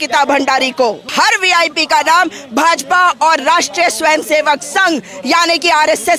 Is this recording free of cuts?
no; 1 cut; at 1.1 s

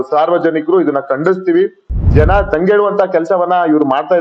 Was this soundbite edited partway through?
yes; 1 cut; at 1.8 s

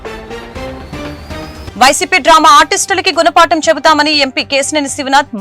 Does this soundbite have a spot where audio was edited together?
yes; 1 cut; at 1.6 s

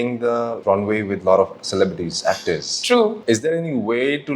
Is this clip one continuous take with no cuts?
no; 1 cut; at 3.2 s

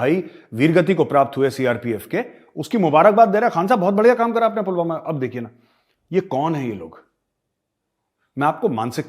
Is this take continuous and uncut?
yes; 0 cuts

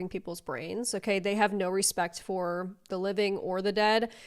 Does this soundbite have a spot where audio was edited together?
no; 0 cuts

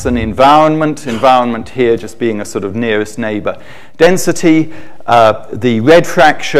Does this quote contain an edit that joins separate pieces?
no; 0 cuts

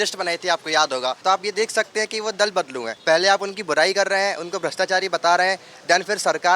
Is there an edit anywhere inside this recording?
yes; 2 cuts; at 1.2 s, 2.9 s

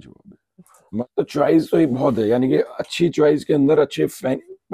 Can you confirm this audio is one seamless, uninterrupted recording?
no; 1 cut; at 1.0 s

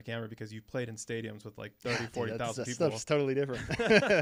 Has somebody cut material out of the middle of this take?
no; 0 cuts

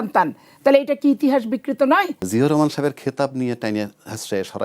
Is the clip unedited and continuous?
no; 1 cut; at 2.2 s

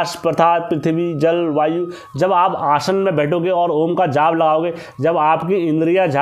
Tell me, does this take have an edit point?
no; 0 cuts

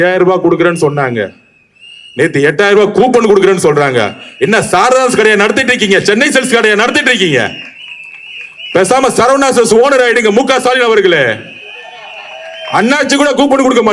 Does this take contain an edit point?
no; 0 cuts

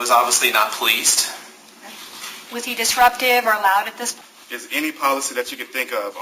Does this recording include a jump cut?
yes; 1 cut; at 4.0 s

